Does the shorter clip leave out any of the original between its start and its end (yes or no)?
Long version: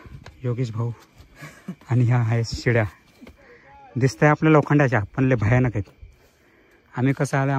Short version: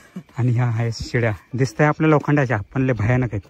yes